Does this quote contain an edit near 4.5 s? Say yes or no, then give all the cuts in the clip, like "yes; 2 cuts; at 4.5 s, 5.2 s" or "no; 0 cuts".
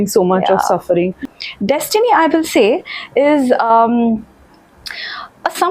no; 1 cut; at 1.3 s